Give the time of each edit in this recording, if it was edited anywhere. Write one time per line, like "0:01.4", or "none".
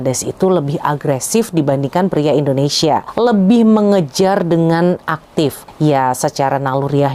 none